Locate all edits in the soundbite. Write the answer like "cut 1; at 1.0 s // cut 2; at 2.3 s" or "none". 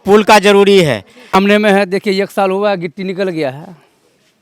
cut 1; at 1.3 s